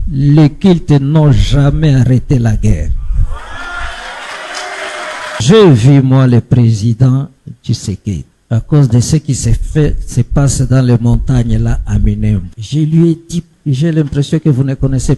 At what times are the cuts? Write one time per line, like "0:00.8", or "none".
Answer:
0:05.4
0:08.3
0:12.6
0:13.5